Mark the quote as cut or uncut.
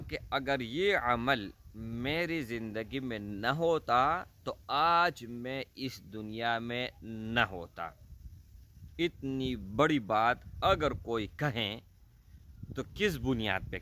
uncut